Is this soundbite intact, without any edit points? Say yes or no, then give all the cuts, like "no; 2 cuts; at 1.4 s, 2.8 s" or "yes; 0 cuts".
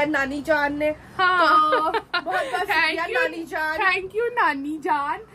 yes; 0 cuts